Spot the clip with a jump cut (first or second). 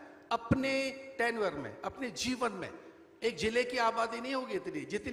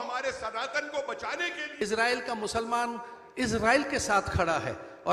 second